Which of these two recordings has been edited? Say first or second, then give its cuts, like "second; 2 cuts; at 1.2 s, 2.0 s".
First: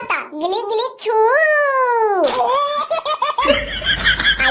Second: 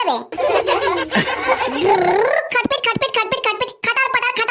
first; 1 cut; at 3.5 s